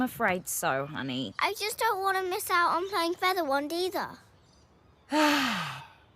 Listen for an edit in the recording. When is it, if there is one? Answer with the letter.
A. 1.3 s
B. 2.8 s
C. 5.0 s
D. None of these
A